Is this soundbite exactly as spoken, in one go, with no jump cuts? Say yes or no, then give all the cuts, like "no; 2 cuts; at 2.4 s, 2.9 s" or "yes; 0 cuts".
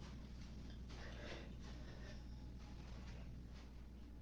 yes; 0 cuts